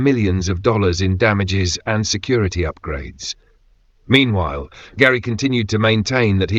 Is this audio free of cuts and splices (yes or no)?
yes